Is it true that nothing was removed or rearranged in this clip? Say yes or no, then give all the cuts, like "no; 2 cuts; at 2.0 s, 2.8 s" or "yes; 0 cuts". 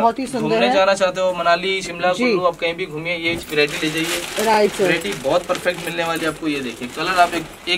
yes; 0 cuts